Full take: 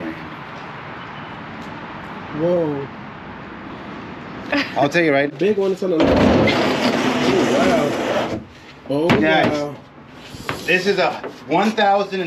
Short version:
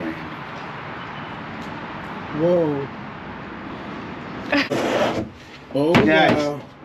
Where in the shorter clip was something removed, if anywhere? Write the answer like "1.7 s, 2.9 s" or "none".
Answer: 4.7 s